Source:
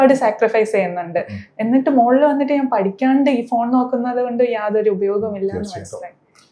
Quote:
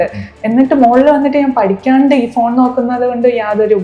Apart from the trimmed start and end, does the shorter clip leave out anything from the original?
no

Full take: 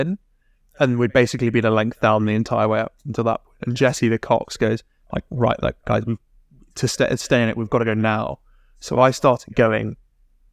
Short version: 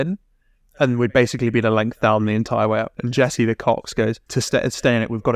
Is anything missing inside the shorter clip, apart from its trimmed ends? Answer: yes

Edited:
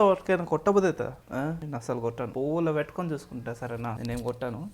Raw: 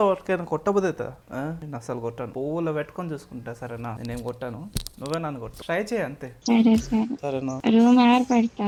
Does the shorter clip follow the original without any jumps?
yes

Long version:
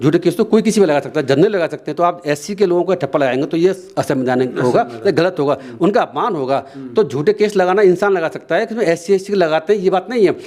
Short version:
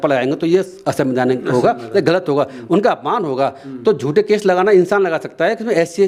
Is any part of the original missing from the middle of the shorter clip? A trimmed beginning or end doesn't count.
no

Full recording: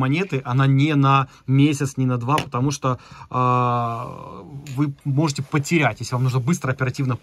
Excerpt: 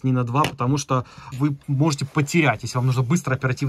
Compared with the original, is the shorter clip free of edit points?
no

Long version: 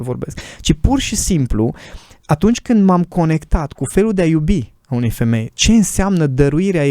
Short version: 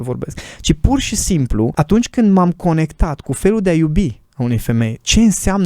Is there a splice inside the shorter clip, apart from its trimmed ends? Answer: yes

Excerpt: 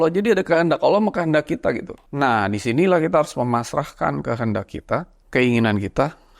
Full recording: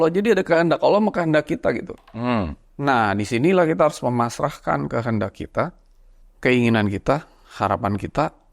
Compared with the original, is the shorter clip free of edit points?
no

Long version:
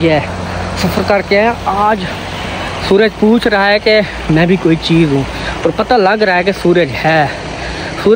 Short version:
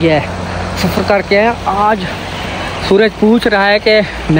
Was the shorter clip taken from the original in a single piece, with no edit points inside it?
yes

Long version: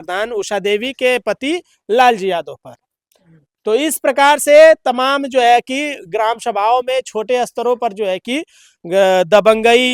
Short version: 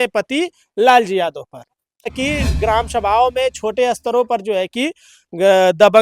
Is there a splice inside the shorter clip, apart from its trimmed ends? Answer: yes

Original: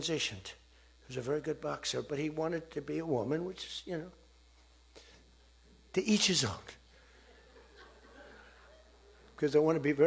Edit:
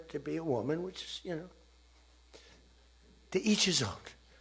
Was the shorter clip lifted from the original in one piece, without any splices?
yes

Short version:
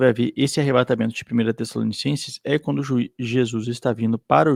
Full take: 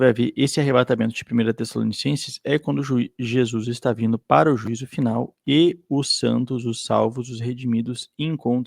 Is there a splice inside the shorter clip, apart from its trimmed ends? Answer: no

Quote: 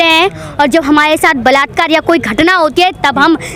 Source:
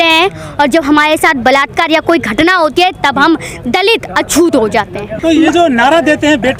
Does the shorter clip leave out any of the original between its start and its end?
no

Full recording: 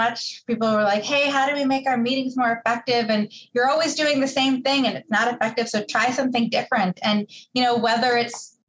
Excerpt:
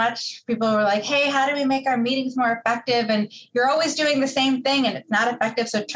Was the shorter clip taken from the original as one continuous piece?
yes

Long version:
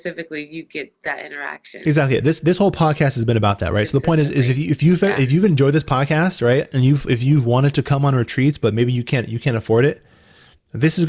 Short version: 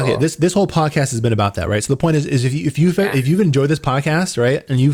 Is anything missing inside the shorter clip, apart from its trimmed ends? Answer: no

